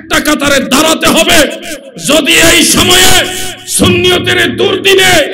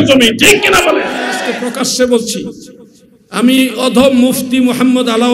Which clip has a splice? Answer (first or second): second